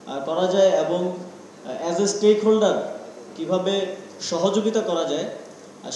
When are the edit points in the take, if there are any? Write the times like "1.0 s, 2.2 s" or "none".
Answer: none